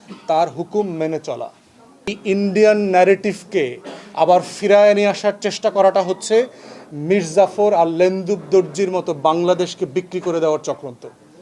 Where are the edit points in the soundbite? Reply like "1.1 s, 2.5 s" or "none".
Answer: 2.2 s